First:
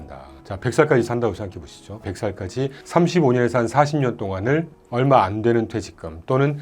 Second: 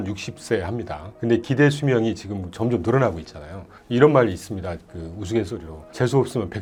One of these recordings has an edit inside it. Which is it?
first; 1 cut; at 2.0 s

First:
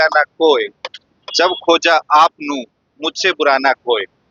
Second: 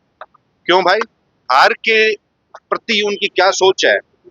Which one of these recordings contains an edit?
second; 1 cut; at 1.4 s

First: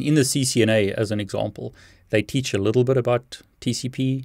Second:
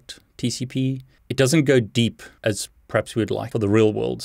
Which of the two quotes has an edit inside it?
second; 2 cuts; at 2.3 s, 3.5 s

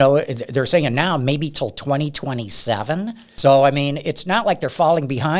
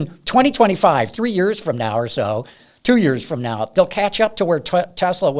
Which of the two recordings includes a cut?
first; 1 cut; at 3.3 s

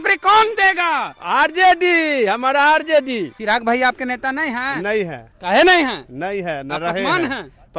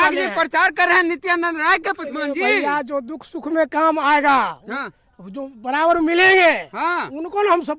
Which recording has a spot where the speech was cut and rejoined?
first; 1 cut; at 3.3 s

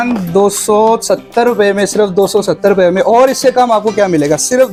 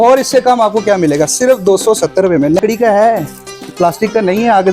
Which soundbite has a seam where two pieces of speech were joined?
second; 1 cut; at 2.6 s

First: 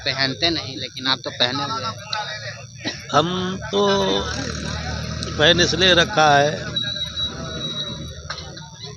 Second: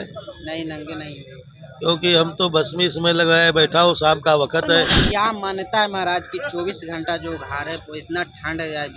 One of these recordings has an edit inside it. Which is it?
second; 1 cut; at 5.0 s

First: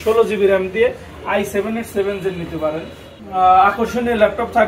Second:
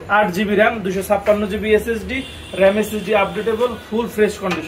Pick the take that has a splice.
first; 1 cut; at 3.2 s

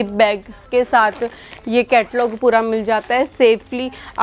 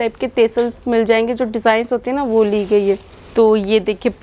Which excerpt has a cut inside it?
second; 1 cut; at 3.1 s

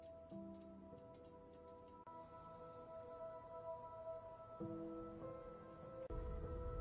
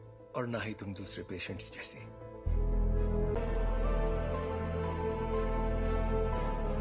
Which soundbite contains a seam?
second; 1 cut; at 3.4 s

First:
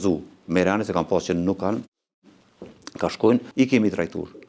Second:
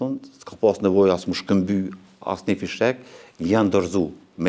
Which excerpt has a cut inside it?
first; 1 cut; at 3.5 s

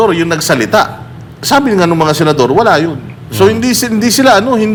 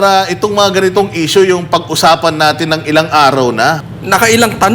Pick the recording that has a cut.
second; 1 cut; at 3.9 s

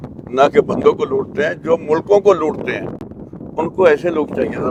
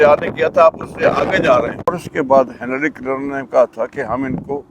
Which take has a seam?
second; 1 cut; at 1.9 s

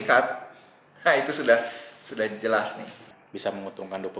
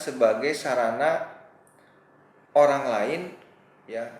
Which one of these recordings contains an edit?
first; 1 cut; at 3.2 s

